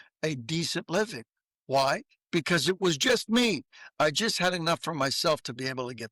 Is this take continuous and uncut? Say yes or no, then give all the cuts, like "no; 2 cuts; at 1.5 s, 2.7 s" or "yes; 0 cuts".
yes; 0 cuts